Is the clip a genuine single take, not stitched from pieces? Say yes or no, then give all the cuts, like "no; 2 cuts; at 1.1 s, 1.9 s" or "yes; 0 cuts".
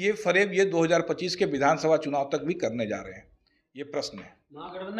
yes; 0 cuts